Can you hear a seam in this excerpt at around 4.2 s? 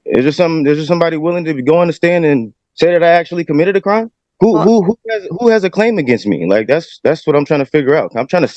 yes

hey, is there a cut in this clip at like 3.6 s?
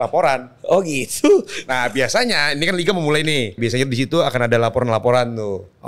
yes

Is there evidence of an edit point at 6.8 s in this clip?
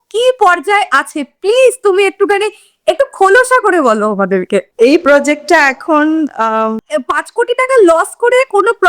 yes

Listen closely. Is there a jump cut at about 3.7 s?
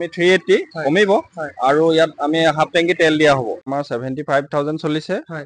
yes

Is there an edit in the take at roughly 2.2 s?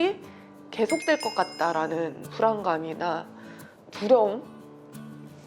yes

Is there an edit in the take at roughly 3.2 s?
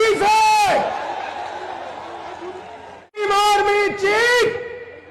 yes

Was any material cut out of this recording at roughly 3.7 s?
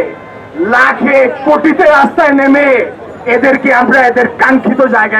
no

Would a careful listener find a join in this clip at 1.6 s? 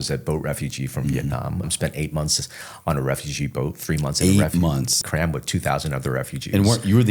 yes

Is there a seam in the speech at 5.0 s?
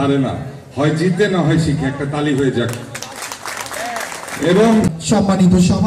yes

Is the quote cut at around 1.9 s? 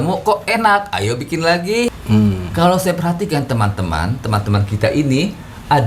yes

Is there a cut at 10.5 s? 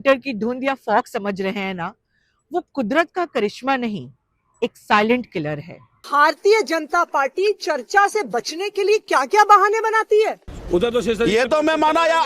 yes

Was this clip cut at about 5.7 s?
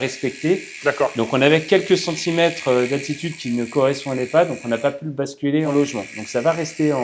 yes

